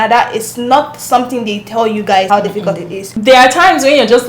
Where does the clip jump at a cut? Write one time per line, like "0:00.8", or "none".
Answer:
0:02.8